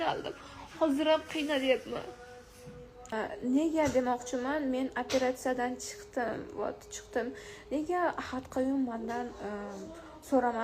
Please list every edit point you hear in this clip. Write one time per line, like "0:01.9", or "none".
0:03.1

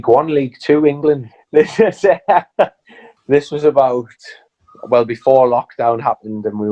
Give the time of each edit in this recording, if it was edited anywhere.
0:01.3

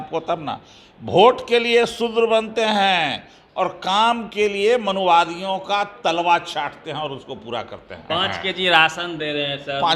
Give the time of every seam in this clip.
0:08.0

